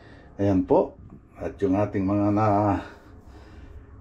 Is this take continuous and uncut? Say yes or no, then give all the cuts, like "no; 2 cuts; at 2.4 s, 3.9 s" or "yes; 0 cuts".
yes; 0 cuts